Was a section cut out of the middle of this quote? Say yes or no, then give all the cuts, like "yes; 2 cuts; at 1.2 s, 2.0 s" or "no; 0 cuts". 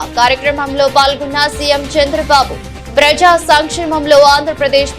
no; 0 cuts